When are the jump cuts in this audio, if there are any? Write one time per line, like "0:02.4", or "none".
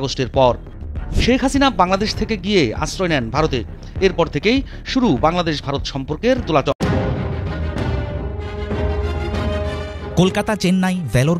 0:06.7